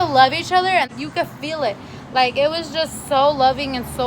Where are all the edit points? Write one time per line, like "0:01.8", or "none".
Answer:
0:00.9

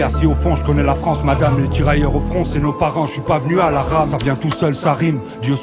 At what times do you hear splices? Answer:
none

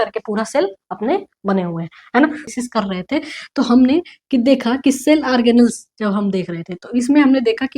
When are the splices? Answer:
0:02.5

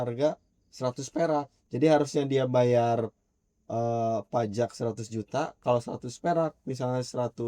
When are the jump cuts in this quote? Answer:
0:01.6

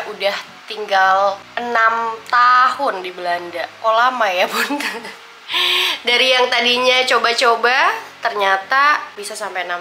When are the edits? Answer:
none

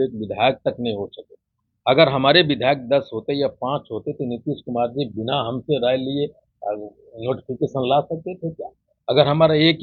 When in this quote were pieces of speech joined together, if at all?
none

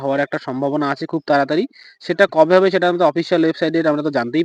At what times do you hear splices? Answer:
none

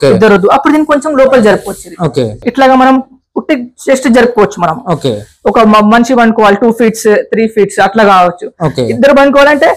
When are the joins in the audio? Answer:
none

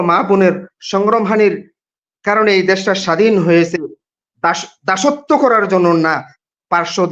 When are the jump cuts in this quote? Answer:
none

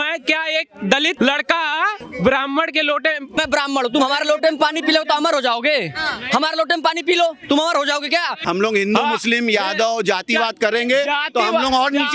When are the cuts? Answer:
0:01.1
0:02.0
0:03.4
0:08.4

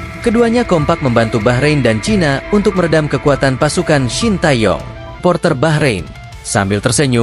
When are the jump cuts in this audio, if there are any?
0:05.2

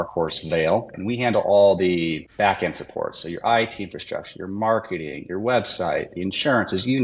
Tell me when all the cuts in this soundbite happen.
0:00.9
0:02.3

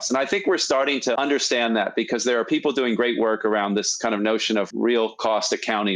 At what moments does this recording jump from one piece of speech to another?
none

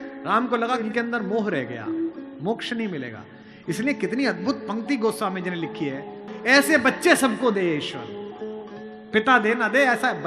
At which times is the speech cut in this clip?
0:06.2

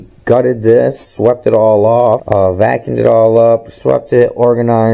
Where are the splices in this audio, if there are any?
0:02.2

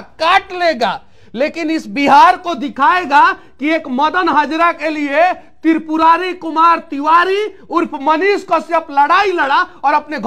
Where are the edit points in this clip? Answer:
none

